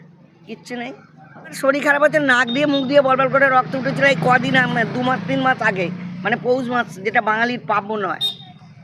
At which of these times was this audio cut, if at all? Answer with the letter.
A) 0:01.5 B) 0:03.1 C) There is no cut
A